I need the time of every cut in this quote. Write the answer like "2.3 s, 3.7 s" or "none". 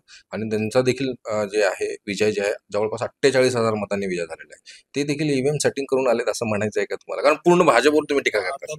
none